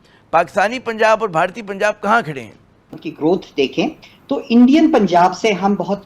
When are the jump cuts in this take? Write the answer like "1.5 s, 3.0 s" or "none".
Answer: 2.9 s

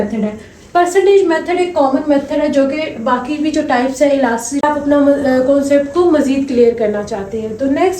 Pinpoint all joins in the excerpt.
4.6 s

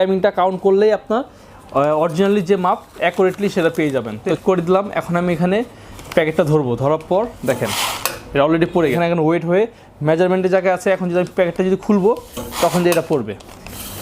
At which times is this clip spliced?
4.3 s, 9.0 s

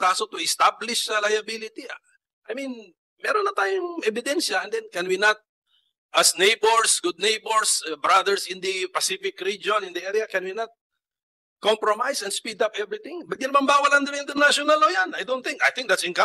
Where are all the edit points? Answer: none

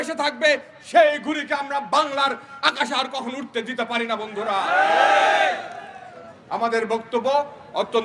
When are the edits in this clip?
none

